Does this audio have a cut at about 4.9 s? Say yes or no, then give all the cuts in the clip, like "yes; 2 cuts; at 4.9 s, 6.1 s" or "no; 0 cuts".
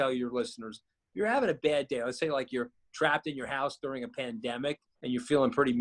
yes; 1 cut; at 4.9 s